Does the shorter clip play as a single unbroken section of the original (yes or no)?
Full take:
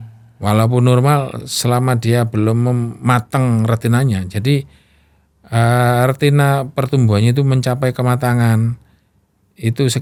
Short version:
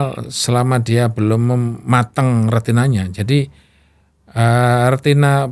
yes